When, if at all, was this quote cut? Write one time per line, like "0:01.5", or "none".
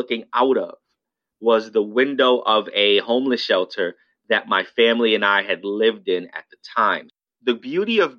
0:07.1